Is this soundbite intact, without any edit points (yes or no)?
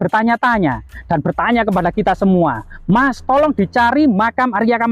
yes